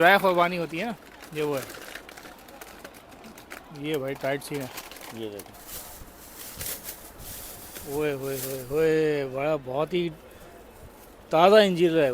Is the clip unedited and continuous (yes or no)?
no